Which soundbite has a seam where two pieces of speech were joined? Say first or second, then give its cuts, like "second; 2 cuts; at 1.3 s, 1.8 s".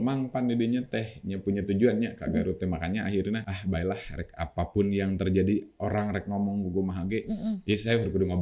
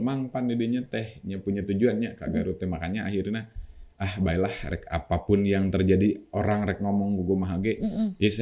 first; 1 cut; at 3.5 s